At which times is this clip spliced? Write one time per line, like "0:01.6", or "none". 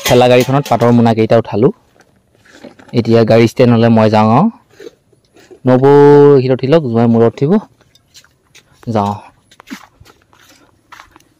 none